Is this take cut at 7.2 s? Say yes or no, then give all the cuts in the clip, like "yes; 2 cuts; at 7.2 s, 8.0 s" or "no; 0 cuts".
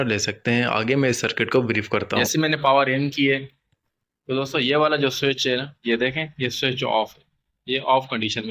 no; 1 cut; at 2.2 s